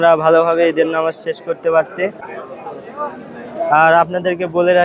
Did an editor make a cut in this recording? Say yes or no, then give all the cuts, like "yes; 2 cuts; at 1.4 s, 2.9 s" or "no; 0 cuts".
no; 0 cuts